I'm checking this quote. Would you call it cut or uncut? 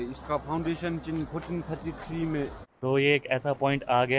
cut